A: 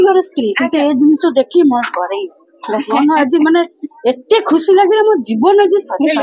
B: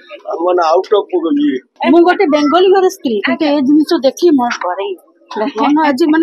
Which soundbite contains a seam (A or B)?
B